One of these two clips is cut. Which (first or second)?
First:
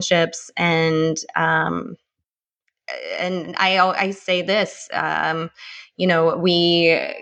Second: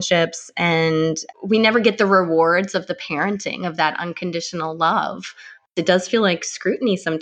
second